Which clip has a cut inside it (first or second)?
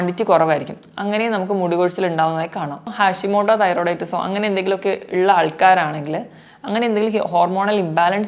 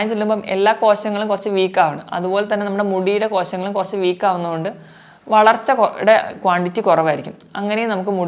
first